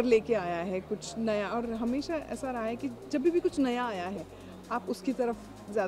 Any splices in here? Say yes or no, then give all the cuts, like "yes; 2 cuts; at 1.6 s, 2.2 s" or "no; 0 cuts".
no; 0 cuts